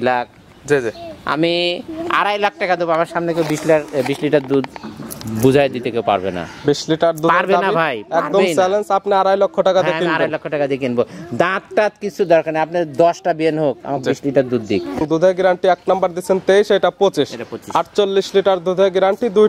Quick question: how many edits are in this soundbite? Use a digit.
1